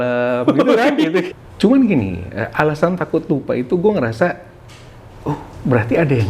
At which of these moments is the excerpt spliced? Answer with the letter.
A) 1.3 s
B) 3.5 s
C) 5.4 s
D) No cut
A